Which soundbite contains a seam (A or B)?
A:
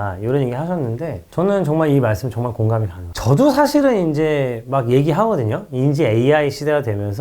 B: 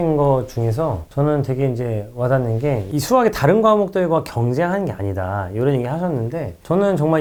A